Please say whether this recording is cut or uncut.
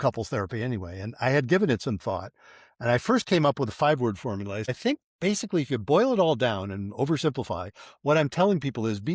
cut